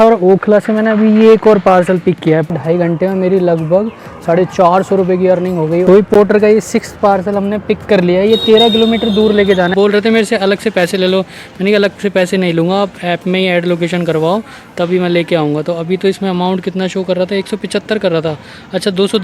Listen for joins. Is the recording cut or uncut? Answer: cut